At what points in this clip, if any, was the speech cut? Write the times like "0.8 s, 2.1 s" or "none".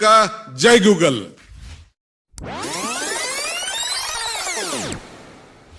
1.3 s